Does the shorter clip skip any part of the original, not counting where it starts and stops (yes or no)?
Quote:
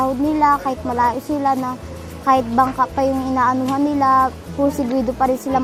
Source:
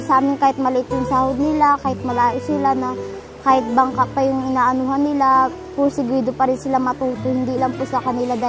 no